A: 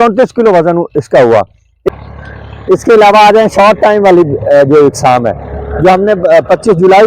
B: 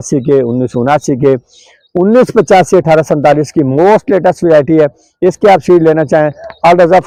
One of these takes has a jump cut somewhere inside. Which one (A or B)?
A